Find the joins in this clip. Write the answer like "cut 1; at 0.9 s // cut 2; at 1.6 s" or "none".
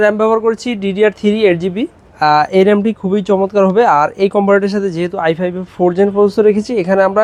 none